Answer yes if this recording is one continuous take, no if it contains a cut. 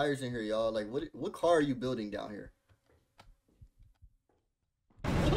yes